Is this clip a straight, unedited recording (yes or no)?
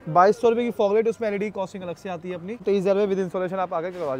no